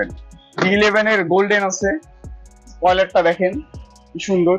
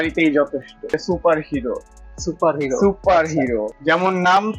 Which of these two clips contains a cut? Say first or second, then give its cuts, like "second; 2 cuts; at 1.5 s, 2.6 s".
second; 2 cuts; at 0.9 s, 3.7 s